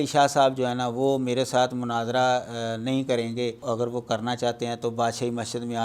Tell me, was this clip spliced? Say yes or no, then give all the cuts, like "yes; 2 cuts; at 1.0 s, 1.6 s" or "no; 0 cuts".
yes; 1 cut; at 3.6 s